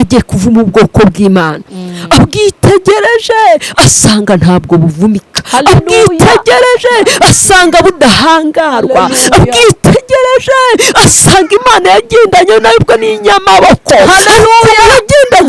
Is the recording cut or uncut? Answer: uncut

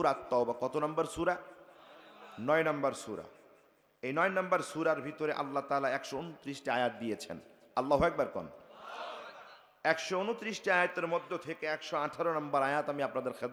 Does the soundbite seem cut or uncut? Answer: uncut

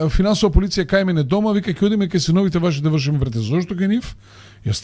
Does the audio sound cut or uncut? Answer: uncut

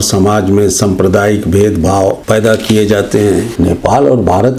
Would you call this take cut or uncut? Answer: cut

